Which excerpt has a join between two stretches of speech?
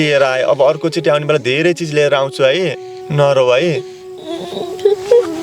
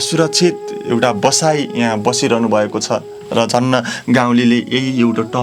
first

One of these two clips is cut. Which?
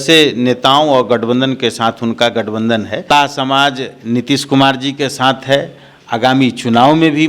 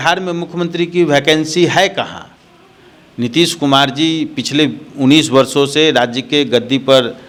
first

